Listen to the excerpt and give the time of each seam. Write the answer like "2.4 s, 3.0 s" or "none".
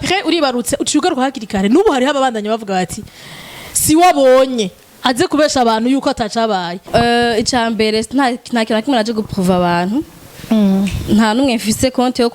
6.9 s